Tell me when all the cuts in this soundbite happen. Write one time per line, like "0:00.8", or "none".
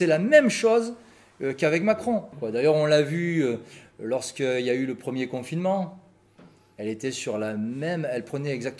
0:02.3